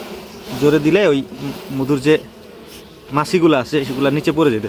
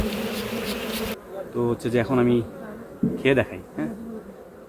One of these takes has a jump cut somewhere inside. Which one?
second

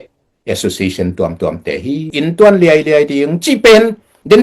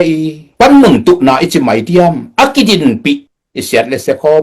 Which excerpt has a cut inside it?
first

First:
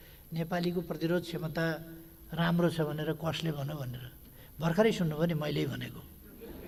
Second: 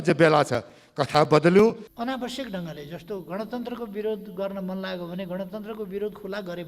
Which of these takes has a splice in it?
second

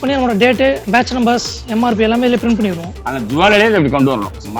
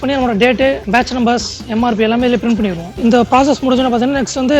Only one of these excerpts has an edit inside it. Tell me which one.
first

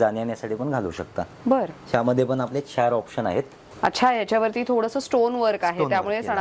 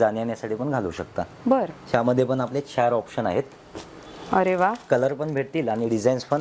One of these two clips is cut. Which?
first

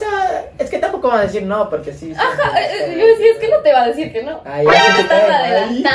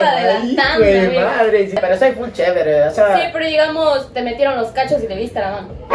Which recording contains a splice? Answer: second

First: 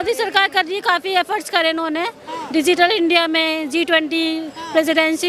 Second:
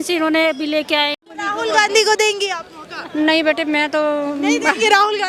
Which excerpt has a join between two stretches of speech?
second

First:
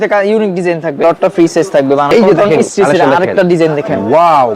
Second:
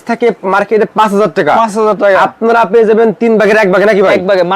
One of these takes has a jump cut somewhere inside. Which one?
first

